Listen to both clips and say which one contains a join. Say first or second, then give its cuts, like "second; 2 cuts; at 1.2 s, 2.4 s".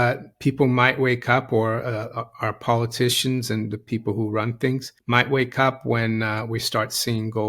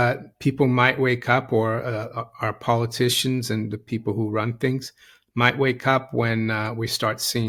first; 1 cut; at 4.9 s